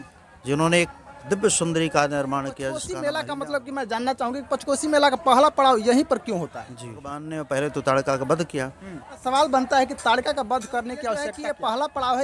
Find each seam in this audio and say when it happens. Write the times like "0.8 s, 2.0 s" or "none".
2.9 s, 7.3 s, 9.1 s, 11.3 s

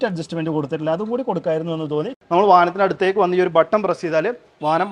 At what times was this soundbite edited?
2.2 s

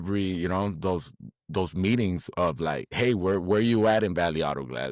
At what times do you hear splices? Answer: 2.9 s

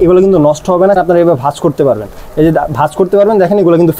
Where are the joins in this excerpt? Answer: 1.0 s

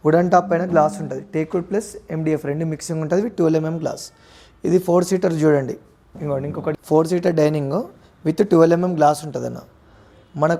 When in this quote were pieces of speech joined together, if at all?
6.8 s

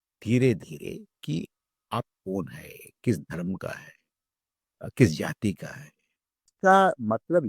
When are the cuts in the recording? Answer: 6.5 s

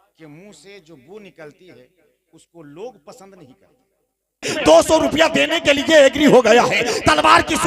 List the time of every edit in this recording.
4.5 s

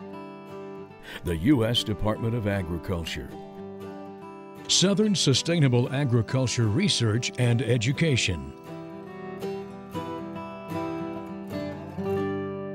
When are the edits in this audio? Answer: 8.5 s

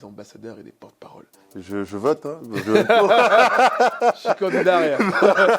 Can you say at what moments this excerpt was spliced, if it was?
1.4 s

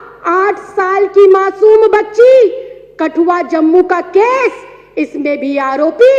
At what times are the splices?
none

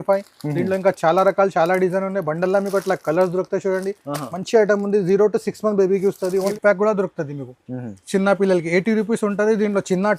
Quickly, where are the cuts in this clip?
6.5 s

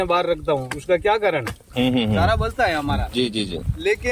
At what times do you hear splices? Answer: 1.6 s

